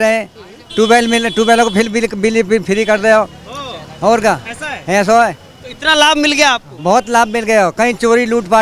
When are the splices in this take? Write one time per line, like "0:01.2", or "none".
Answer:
none